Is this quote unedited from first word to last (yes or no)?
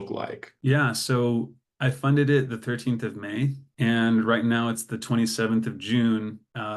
yes